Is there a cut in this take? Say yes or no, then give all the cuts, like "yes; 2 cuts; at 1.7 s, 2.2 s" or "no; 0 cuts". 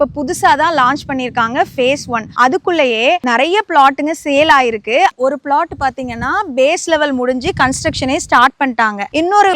yes; 1 cut; at 5.1 s